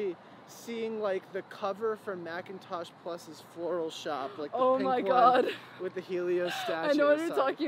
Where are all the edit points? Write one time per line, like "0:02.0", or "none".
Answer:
none